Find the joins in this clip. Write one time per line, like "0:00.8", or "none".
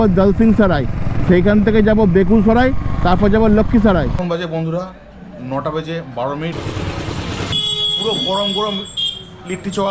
0:04.1
0:06.5
0:07.5